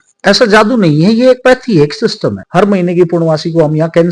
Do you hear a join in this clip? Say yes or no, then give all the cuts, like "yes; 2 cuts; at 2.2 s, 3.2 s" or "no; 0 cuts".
yes; 1 cut; at 2.4 s